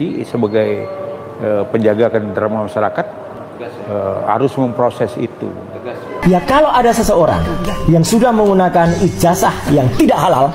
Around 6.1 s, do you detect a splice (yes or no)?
yes